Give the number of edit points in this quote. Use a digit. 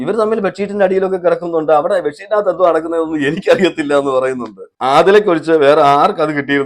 1